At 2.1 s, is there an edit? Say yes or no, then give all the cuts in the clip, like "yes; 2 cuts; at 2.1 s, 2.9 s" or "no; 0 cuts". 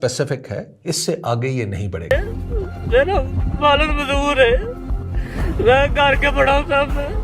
yes; 1 cut; at 2.1 s